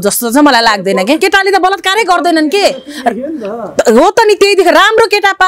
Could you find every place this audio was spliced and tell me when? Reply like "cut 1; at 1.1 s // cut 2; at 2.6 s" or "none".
cut 1; at 1.2 s